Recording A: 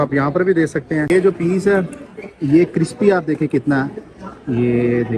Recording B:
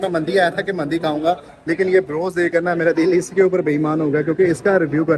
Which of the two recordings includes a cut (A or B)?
A